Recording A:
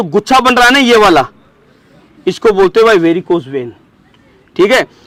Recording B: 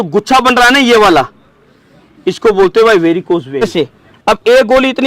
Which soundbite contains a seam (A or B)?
B